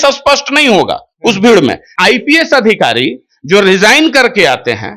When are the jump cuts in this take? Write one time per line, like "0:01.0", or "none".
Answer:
0:01.9

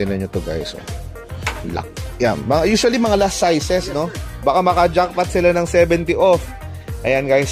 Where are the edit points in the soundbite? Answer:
none

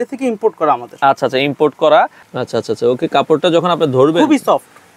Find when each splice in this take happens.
0:02.2

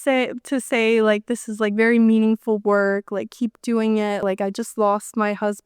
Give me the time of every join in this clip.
0:04.2

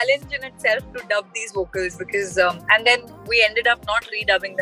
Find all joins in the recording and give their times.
none

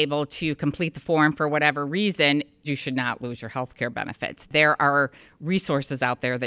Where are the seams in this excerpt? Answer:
0:02.6
0:04.5

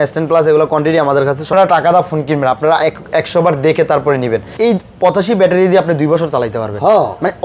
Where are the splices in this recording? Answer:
0:01.5
0:04.5

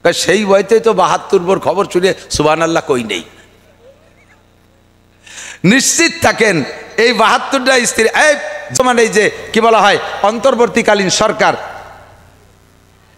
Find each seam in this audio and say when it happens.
0:08.8

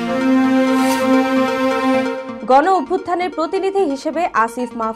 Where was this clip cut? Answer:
0:02.3

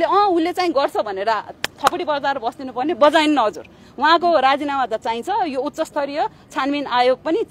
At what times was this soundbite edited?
none

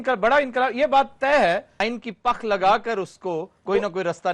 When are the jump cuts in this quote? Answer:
0:01.7

